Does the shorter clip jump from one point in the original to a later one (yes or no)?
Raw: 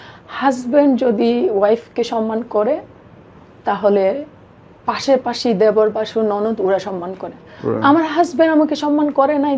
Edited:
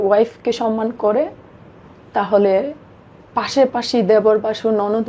no